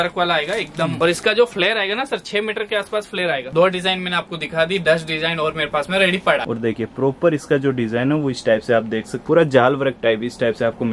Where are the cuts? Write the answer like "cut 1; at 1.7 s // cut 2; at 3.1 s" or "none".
cut 1; at 0.9 s // cut 2; at 3.5 s // cut 3; at 6.4 s // cut 4; at 9.2 s